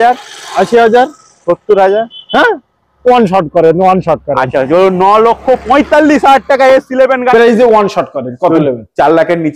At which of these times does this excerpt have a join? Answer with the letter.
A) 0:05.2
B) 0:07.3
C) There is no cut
B